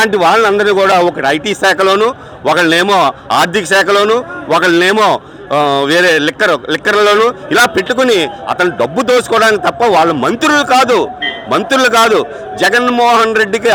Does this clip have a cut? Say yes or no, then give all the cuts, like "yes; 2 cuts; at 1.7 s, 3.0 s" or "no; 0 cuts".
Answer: no; 0 cuts